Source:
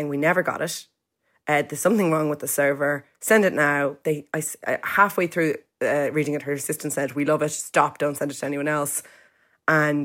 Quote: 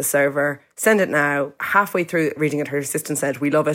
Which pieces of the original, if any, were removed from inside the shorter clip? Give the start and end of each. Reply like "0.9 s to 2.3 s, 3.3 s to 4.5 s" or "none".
4.0 s to 4.8 s, 5.6 s to 6.1 s